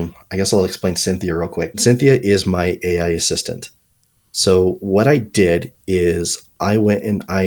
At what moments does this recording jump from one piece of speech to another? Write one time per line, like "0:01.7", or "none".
0:01.8